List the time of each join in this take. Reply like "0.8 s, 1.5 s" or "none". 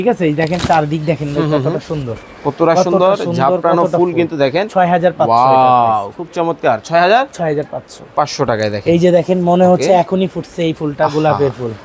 none